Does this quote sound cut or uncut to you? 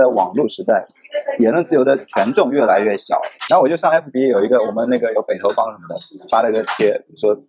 cut